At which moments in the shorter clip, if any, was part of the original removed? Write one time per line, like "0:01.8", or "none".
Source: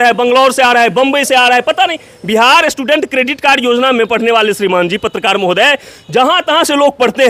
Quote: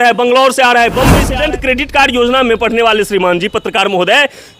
0:01.2

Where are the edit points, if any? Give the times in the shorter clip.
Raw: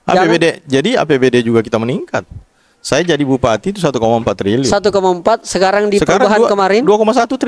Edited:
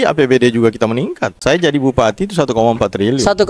0:01.3

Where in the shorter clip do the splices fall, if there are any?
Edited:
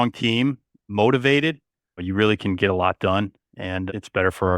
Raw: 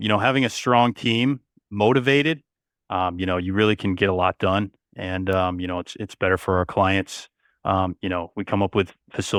0:02.0
0:03.8

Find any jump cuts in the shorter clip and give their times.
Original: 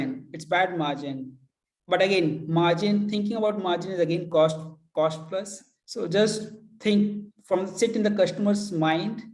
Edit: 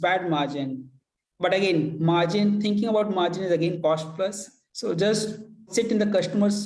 0:03.8
0:05.6

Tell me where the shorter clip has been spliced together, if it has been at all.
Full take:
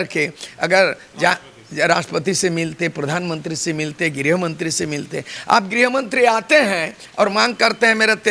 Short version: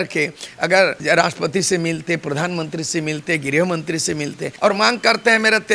0:01.0
0:04.4

